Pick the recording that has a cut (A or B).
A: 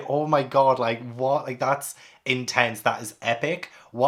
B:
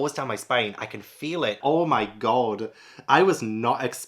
B